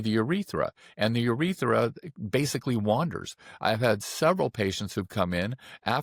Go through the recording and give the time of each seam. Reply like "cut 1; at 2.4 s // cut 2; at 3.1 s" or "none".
none